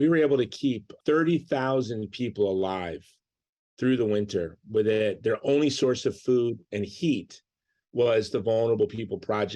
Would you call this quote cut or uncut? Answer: uncut